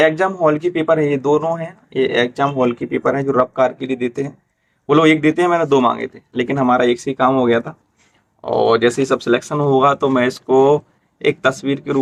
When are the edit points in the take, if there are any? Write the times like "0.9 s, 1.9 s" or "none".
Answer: none